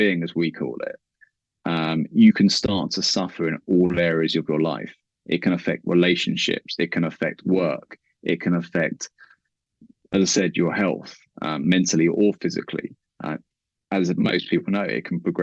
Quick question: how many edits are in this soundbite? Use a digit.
0